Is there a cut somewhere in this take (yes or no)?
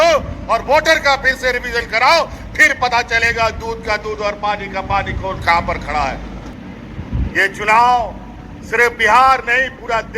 yes